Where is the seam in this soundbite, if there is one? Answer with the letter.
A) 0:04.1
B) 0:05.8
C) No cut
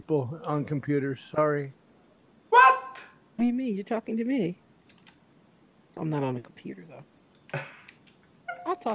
C